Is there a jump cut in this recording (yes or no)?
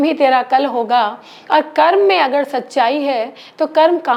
no